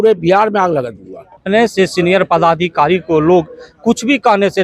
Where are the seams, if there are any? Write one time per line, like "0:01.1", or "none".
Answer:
0:01.4